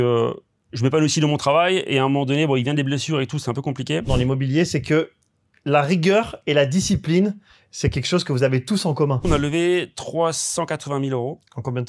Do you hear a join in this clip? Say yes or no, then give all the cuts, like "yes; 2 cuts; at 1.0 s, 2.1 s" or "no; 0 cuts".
yes; 2 cuts; at 4.1 s, 9.2 s